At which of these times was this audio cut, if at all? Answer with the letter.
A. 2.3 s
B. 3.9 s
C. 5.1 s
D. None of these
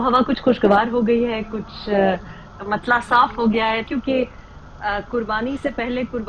B